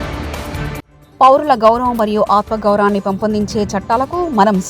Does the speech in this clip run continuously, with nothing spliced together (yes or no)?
no